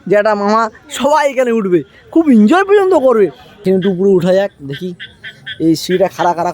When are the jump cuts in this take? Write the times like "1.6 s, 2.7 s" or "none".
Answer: 3.5 s